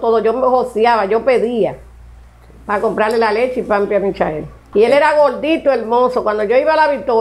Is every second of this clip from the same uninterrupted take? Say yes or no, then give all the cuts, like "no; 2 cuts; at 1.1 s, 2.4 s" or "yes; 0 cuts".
no; 1 cut; at 4.5 s